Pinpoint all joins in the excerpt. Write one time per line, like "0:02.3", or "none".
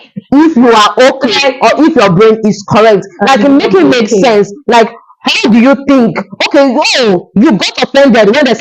none

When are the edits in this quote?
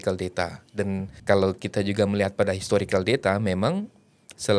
0:01.1

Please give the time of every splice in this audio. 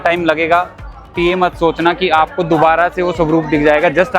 0:01.1

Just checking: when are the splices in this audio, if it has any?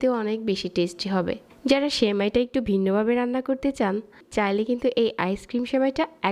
0:01.5
0:04.2

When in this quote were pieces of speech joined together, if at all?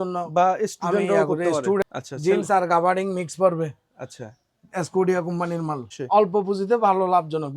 0:01.8
0:06.0

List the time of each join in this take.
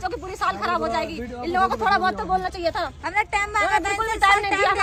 none

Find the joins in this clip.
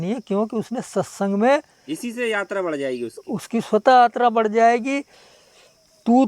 0:05.2

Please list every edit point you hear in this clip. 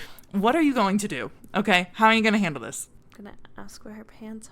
0:03.0

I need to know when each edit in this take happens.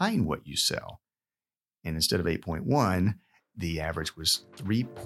none

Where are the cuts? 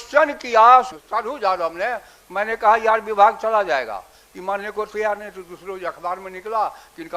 0:00.9

